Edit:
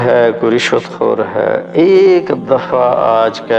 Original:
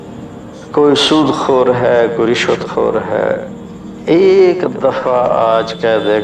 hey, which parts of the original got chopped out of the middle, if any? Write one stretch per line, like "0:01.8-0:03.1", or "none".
0:03.4-0:04.0